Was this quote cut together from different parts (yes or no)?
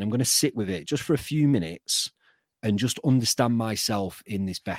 no